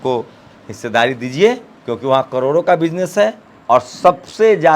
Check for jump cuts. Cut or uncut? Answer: cut